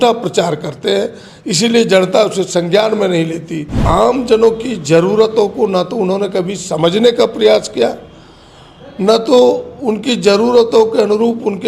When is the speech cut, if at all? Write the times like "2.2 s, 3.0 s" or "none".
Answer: 3.8 s